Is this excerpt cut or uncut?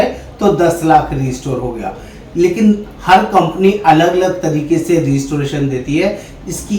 uncut